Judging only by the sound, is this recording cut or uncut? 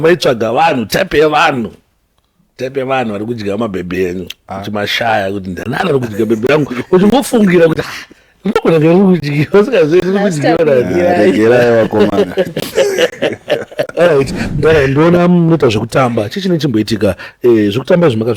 cut